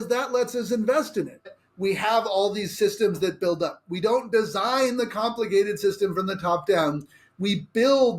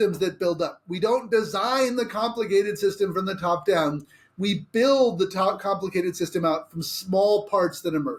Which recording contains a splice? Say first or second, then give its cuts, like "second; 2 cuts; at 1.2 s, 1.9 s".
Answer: first; 1 cut; at 1.5 s